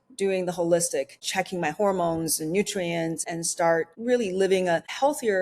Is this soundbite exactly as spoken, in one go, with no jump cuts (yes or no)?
no